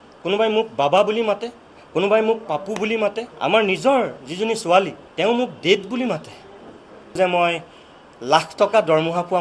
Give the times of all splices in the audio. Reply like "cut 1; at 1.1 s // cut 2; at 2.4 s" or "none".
cut 1; at 3.3 s // cut 2; at 5.0 s // cut 3; at 7.2 s